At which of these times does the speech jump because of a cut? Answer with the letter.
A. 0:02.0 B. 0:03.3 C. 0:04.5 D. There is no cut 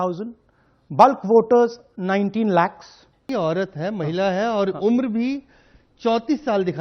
B